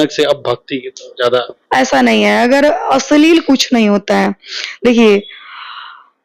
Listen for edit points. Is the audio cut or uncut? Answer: uncut